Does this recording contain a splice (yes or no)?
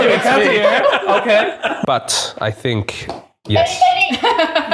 yes